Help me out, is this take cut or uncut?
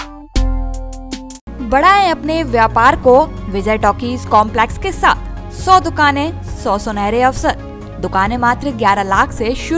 uncut